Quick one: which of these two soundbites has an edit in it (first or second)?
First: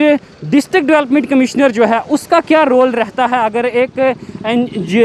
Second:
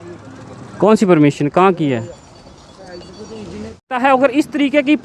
second